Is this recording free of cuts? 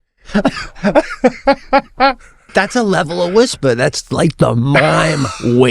no; 1 cut; at 2.4 s

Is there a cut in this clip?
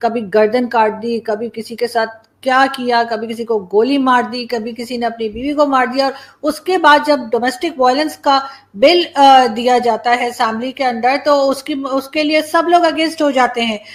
no; 0 cuts

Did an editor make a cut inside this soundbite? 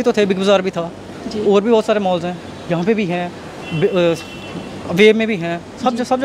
no; 0 cuts

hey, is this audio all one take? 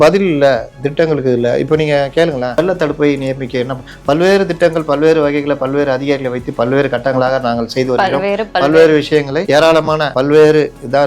no; 3 cuts; at 2.6 s, 9.4 s, 10.1 s

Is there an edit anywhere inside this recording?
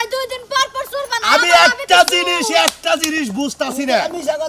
no; 0 cuts

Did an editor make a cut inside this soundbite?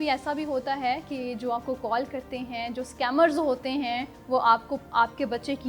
no; 0 cuts

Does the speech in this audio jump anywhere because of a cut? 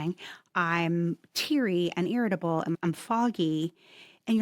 yes; 1 cut; at 2.8 s

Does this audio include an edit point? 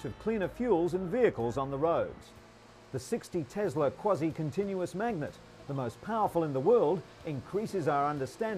no; 0 cuts

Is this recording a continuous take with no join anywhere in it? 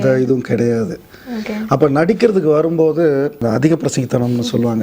no; 1 cut; at 3.4 s

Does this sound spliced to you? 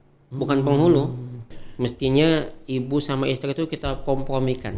yes; 1 cut; at 1.6 s

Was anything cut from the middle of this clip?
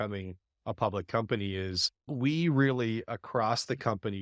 yes; 1 cut; at 2.1 s

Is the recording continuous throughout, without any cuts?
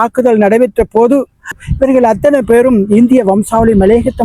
no; 1 cut; at 1.6 s

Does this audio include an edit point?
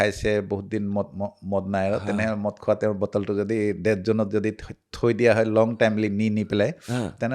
no; 0 cuts

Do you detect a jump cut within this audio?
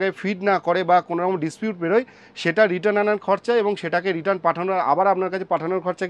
no; 0 cuts

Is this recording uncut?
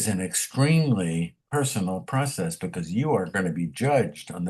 no; 1 cut; at 1.4 s

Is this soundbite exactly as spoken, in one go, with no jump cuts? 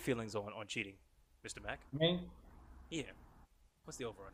yes; 0 cuts

